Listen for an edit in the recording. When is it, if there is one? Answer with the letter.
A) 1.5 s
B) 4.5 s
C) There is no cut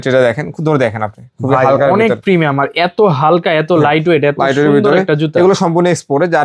C